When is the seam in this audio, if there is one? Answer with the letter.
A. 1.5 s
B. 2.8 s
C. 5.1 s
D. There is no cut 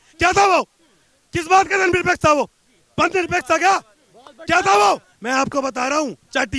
C